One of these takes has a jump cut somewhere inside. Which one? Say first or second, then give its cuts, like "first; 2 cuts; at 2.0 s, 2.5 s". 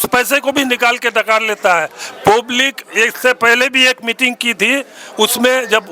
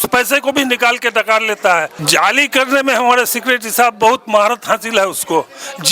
second; 1 cut; at 2.0 s